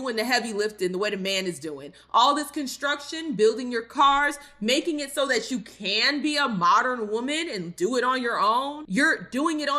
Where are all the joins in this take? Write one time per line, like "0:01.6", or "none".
0:08.7